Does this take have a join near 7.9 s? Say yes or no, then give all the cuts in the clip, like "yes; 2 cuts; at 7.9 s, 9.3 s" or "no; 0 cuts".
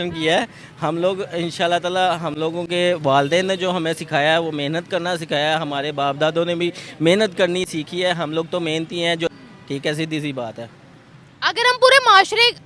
no; 1 cut; at 9.3 s